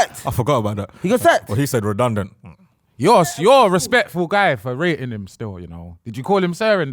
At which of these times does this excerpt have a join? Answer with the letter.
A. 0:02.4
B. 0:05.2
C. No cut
C